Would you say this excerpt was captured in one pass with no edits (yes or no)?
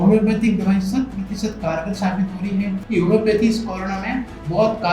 no